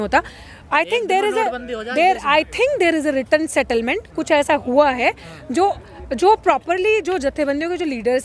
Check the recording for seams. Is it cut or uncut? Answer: uncut